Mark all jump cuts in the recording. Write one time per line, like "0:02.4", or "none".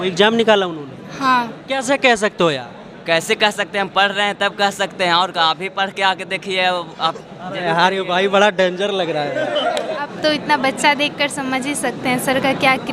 0:01.7
0:10.1